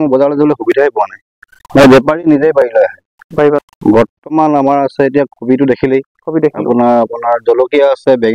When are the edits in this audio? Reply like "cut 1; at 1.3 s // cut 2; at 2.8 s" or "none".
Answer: cut 1; at 3.7 s